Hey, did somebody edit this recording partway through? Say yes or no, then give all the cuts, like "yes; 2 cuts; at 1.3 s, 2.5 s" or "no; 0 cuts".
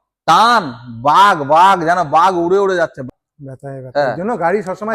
yes; 1 cut; at 3.0 s